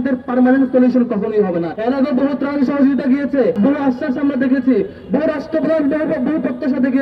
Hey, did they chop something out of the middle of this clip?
yes; 2 cuts; at 1.7 s, 3.6 s

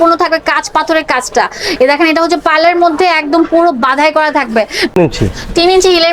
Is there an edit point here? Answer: yes; 1 cut; at 4.9 s

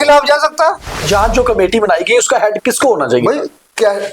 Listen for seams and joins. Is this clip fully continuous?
no; 1 cut; at 1.0 s

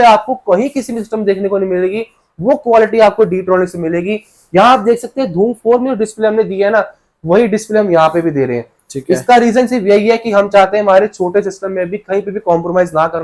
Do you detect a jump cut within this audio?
no; 0 cuts

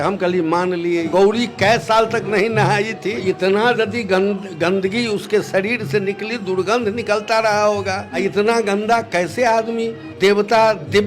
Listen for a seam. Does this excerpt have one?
yes; 4 cuts; at 1.1 s, 3.2 s, 8.1 s, 10.0 s

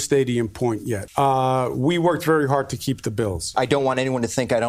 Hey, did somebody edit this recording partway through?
yes; 2 cuts; at 1.0 s, 3.5 s

